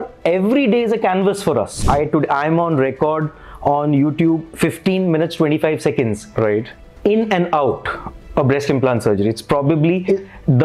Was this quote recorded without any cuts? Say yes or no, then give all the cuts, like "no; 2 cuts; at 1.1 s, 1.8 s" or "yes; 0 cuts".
no; 1 cut; at 1.7 s